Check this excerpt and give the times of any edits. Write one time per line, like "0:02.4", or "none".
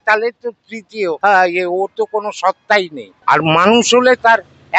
0:01.2
0:03.0